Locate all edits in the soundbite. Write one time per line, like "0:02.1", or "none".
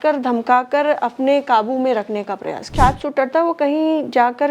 0:02.7